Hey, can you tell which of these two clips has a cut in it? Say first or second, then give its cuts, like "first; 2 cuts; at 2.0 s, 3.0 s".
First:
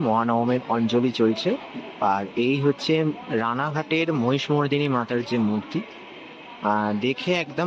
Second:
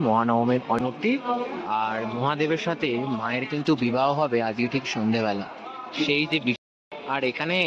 second; 2 cuts; at 0.8 s, 6.6 s